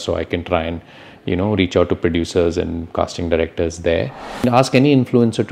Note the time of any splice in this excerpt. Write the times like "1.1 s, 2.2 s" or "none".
4.4 s